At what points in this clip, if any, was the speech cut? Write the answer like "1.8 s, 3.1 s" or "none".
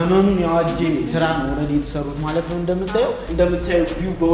3.2 s